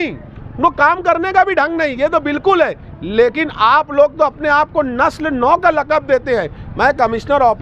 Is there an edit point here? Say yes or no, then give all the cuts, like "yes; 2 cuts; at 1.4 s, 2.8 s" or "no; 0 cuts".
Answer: no; 0 cuts